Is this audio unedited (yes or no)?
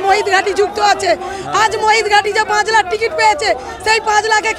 yes